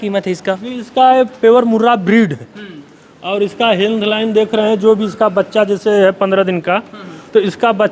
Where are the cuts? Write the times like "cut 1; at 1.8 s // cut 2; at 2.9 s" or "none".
none